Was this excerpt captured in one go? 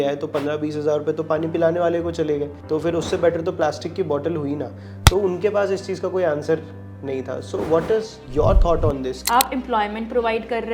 no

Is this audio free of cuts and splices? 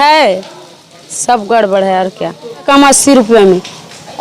no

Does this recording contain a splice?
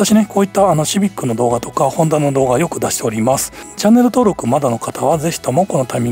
yes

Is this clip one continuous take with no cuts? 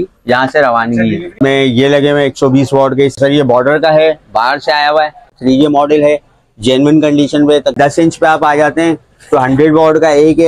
no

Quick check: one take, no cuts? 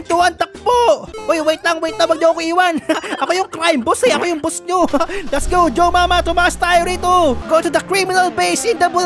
yes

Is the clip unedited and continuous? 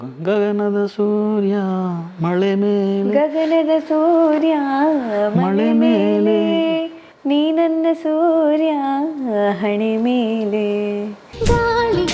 yes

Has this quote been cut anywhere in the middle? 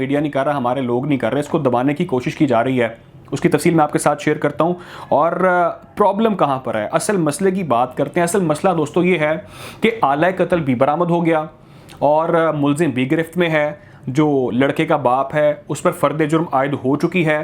no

